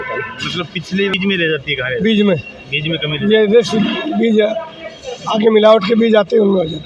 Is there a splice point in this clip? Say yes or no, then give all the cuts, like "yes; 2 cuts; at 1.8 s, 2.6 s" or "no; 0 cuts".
yes; 1 cut; at 1.1 s